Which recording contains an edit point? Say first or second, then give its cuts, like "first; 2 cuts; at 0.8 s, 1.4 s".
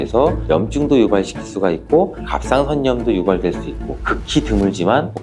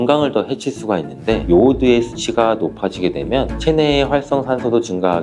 second; 1 cut; at 1.4 s